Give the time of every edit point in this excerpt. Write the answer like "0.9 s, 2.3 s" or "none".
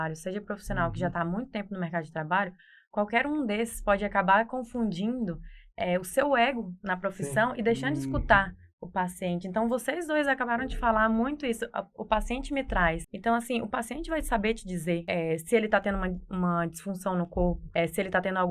13.1 s, 15.0 s, 17.6 s

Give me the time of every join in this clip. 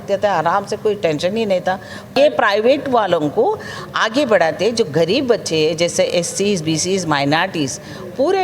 2.1 s

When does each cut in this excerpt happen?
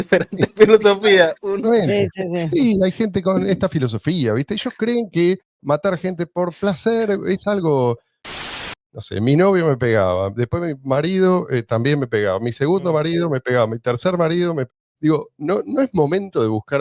5.5 s, 8.6 s

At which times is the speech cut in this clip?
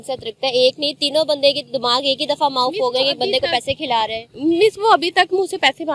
none

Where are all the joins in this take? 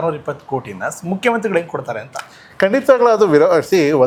none

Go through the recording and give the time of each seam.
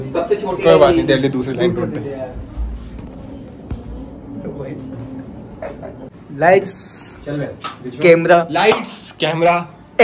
6.1 s

